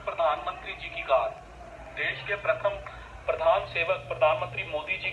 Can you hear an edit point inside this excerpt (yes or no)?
no